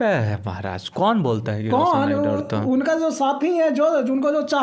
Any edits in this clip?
no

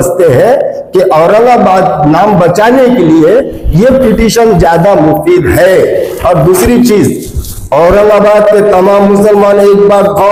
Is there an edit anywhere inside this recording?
no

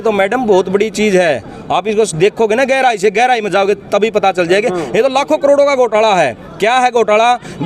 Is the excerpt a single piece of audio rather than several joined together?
yes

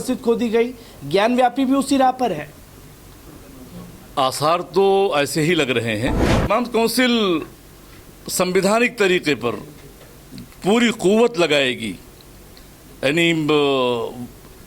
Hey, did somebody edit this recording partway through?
yes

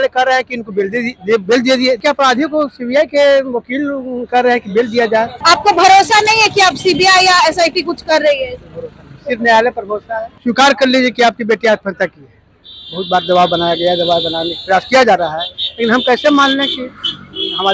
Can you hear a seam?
yes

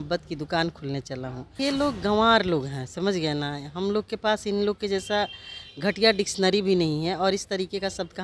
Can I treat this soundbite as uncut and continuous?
no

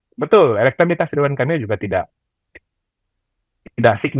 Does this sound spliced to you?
no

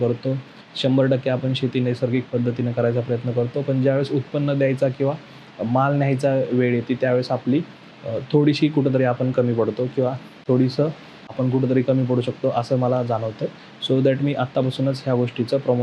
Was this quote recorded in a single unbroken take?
yes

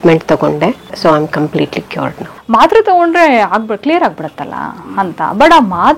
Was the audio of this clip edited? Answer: yes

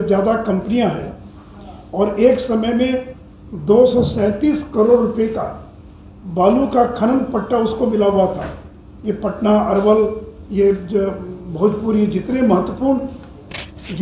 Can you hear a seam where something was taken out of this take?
no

